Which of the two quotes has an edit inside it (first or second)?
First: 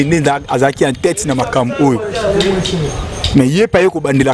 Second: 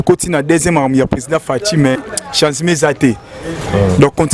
second